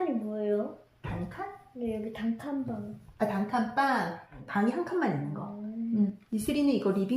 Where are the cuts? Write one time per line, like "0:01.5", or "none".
0:04.3
0:06.2